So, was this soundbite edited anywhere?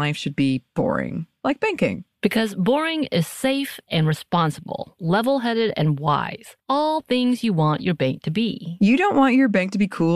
no; 0 cuts

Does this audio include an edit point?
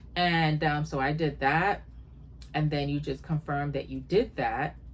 no; 0 cuts

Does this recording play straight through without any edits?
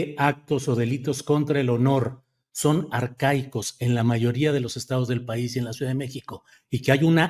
yes; 0 cuts

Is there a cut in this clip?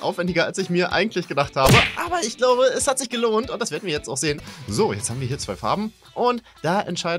yes; 1 cut; at 4.5 s

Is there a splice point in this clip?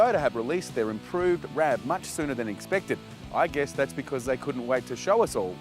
yes; 1 cut; at 1.5 s

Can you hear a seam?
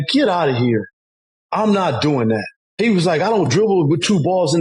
yes; 1 cut; at 2.6 s

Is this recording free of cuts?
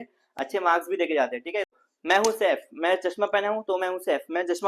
no; 1 cut; at 1.7 s

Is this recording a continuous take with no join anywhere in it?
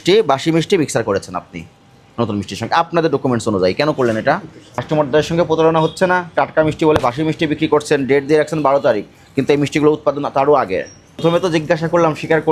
no; 2 cuts; at 4.7 s, 11.0 s

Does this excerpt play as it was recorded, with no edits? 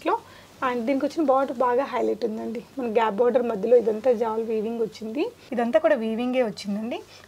no; 1 cut; at 5.4 s

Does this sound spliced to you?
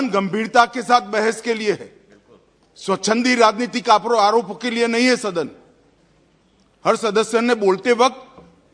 no; 0 cuts

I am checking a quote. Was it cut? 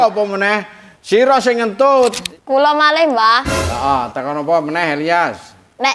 yes; 1 cut; at 2.2 s

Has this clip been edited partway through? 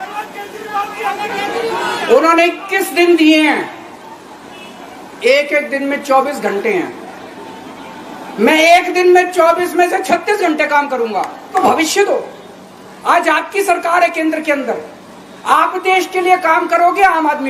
yes; 2 cuts; at 1.2 s, 11.5 s

